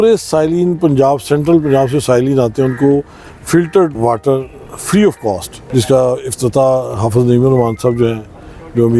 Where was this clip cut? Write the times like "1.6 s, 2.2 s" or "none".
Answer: none